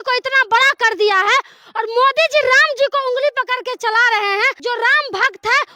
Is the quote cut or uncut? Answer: cut